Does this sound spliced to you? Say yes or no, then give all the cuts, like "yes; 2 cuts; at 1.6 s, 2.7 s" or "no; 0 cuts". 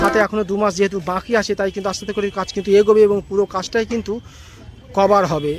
no; 0 cuts